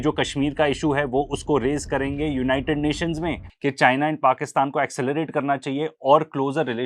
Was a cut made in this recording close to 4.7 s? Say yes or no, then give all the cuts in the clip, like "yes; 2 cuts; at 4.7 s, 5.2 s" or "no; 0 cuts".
no; 1 cut; at 3.4 s